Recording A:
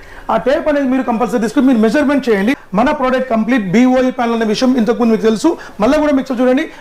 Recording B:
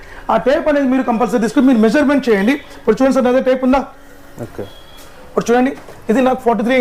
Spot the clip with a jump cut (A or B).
A